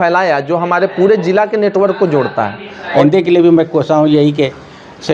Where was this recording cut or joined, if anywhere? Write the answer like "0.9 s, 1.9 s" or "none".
3.0 s